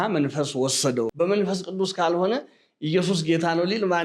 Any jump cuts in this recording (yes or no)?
yes